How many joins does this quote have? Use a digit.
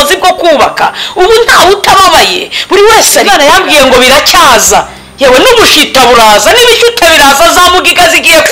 1